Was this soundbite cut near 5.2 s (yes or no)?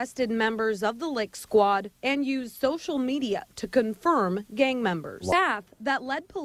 no